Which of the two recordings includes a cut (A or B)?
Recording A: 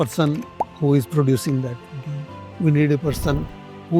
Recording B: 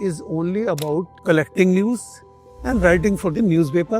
B